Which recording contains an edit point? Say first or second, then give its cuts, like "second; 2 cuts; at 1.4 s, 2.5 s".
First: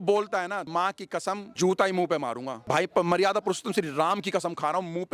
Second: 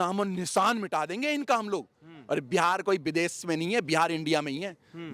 first; 2 cuts; at 0.9 s, 2.5 s